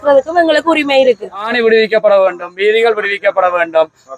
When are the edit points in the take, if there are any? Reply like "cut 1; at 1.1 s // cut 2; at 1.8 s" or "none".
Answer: cut 1; at 1.5 s